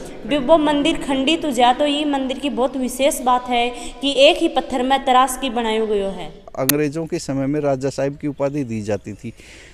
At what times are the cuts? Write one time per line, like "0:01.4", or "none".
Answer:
none